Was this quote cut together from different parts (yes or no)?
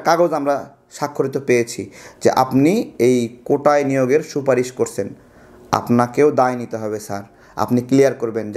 no